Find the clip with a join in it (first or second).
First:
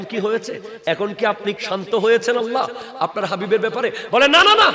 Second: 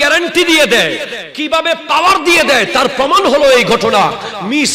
first